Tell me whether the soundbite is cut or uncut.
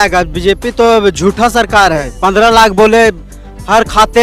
cut